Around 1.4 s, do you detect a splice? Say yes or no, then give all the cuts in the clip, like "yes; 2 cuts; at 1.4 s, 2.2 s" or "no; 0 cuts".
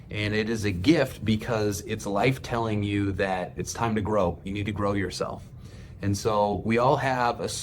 no; 1 cut; at 4.4 s